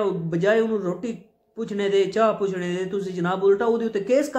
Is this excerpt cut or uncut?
uncut